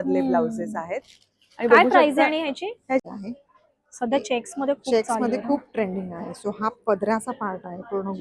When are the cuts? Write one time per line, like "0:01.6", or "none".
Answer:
0:03.1